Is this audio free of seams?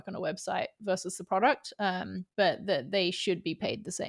no; 1 cut; at 2.2 s

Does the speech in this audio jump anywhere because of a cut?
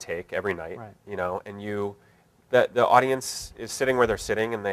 yes; 1 cut; at 1.2 s

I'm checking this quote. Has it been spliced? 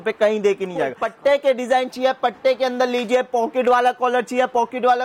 yes; 1 cut; at 1.0 s

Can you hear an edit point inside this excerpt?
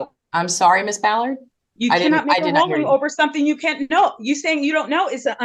no; 0 cuts

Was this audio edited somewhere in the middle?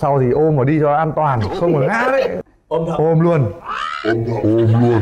yes; 1 cut; at 2.4 s

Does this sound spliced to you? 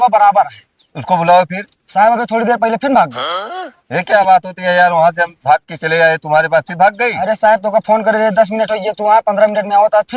no; 0 cuts

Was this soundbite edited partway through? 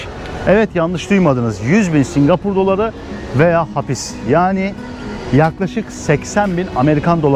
no; 0 cuts

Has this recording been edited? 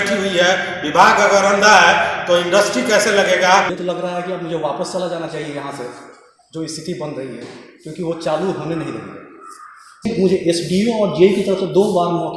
yes; 2 cuts; at 3.7 s, 10.0 s

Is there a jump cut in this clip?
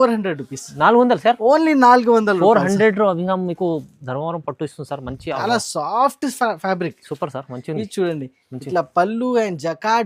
yes; 1 cut; at 5.4 s

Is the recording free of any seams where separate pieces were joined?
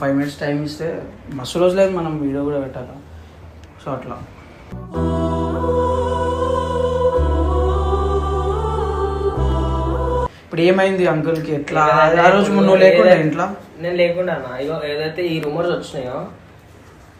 yes; 0 cuts

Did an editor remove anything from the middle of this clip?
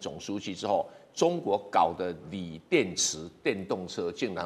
no; 0 cuts

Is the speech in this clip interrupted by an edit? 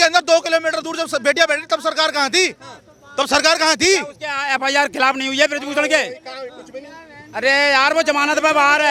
no; 0 cuts

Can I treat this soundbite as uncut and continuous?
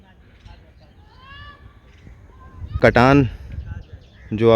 no; 1 cut; at 2.7 s

